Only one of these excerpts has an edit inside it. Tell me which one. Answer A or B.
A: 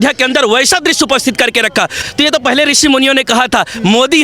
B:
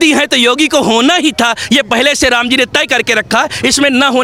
A